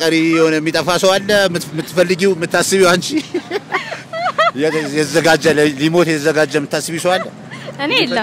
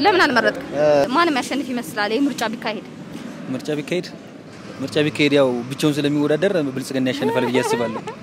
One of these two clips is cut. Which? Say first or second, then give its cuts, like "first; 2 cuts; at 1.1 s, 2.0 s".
second; 1 cut; at 1.1 s